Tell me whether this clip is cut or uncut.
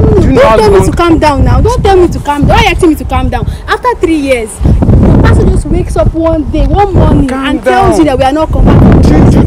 uncut